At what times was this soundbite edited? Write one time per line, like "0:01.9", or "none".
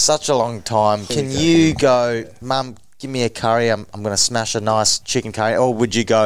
0:01.1
0:02.3
0:05.0

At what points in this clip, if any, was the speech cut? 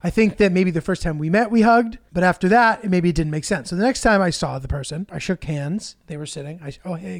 0:02.0
0:05.1

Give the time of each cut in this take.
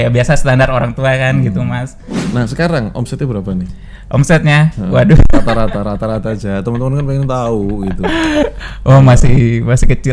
0:02.1

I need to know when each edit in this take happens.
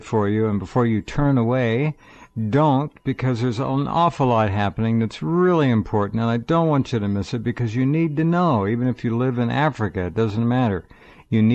none

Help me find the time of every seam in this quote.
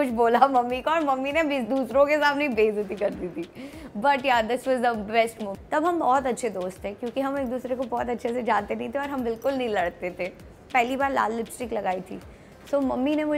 0:05.5
0:10.7

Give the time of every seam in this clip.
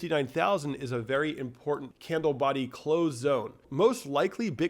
0:01.9
0:03.6

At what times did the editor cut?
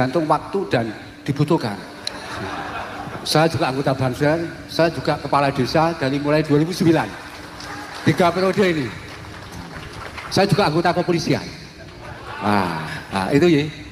0:13.0

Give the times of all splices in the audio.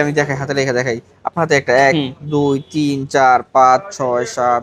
none

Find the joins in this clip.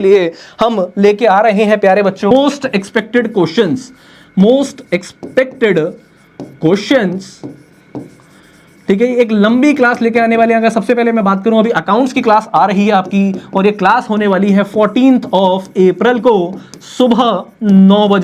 0:02.3

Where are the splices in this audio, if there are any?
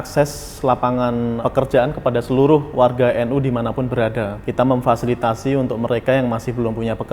0:01.4
0:04.4

